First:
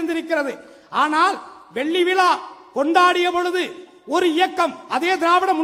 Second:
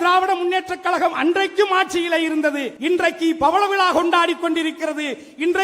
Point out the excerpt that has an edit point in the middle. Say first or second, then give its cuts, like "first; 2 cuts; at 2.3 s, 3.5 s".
second; 1 cut; at 2.7 s